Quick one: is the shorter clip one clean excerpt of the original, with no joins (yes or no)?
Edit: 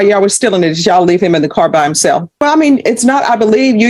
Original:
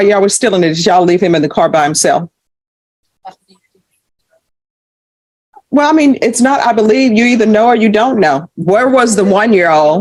no